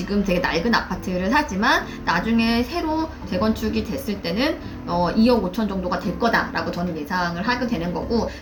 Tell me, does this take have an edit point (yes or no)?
no